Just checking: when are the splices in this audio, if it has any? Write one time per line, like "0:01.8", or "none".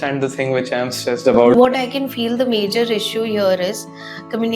0:01.5